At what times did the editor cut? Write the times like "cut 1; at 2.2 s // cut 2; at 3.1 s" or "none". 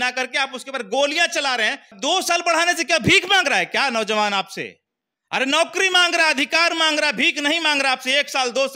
cut 1; at 1.9 s

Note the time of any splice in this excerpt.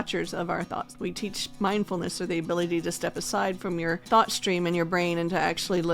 cut 1; at 1.0 s // cut 2; at 4.0 s

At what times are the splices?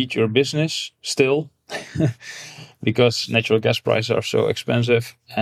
none

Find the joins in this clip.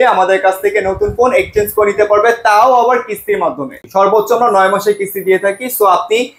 cut 1; at 3.8 s

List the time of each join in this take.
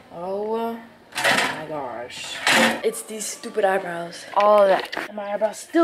cut 1; at 2.8 s // cut 2; at 4.2 s

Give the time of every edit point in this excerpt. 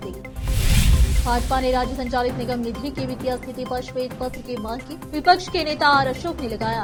none

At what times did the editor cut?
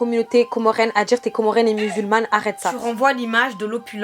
cut 1; at 2.8 s

